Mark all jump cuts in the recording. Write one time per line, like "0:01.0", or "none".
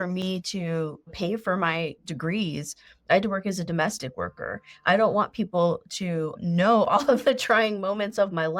0:01.1
0:02.0
0:06.4